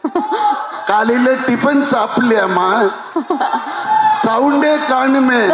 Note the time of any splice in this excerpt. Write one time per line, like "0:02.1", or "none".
none

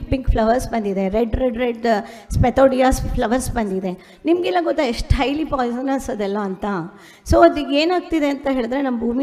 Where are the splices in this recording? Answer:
none

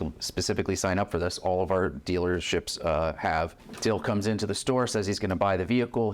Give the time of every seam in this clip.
0:03.6

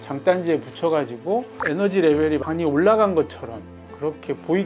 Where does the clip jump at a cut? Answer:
none

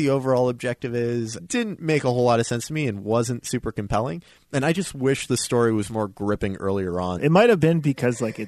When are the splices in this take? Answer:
0:01.4
0:07.2

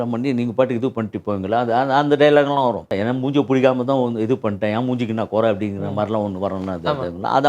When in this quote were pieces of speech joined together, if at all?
0:02.9

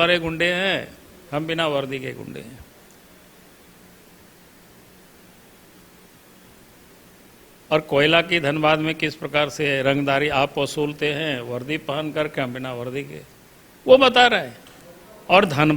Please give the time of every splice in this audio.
none

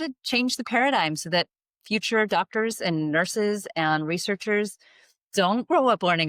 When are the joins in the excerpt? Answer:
none

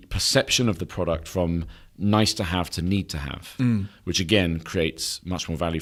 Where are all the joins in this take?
none

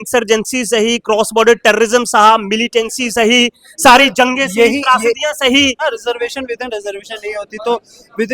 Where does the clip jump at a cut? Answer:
0:05.8

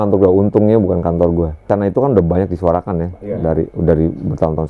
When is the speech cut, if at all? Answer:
0:01.6

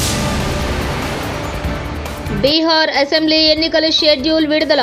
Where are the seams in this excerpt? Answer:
0:02.2

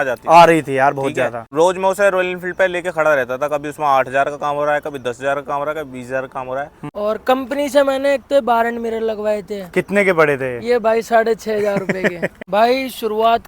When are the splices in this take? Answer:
0:01.4
0:06.8
0:12.3

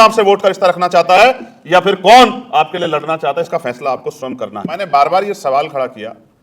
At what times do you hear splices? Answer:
0:04.7

